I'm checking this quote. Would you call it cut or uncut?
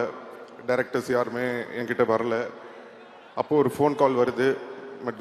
uncut